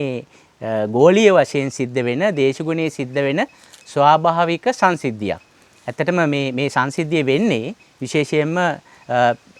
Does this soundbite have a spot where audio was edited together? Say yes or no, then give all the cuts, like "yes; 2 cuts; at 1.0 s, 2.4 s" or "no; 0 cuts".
no; 0 cuts